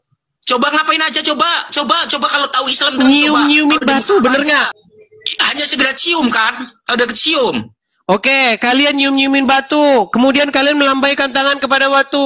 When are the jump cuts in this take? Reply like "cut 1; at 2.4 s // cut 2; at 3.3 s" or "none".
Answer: cut 1; at 4.7 s